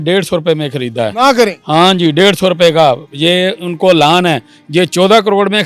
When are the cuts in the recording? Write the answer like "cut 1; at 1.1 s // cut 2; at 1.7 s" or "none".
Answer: none